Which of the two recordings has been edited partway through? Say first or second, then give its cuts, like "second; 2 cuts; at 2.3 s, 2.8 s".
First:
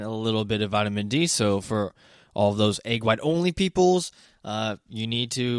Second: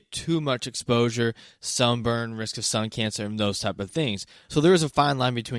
second; 1 cut; at 4.3 s